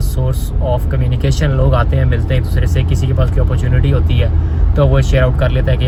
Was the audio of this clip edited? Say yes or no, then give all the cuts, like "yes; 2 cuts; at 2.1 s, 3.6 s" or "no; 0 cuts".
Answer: no; 0 cuts